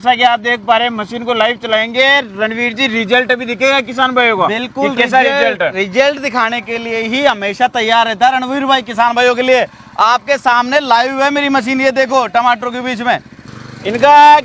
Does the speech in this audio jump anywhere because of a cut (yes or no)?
no